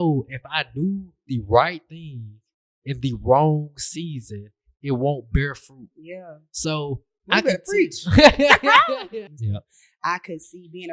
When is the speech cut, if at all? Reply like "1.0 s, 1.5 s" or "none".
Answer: 9.7 s